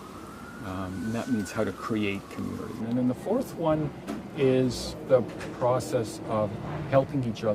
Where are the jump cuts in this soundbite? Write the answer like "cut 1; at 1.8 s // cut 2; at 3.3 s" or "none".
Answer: cut 1; at 2.8 s // cut 2; at 5.0 s